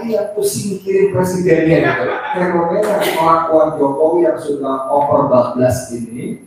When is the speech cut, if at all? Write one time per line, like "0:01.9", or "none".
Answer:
0:02.4